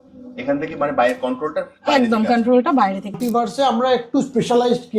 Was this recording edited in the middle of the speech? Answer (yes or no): yes